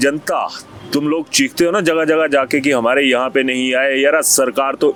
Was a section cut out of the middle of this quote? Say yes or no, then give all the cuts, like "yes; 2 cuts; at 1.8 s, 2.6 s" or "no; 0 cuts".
no; 0 cuts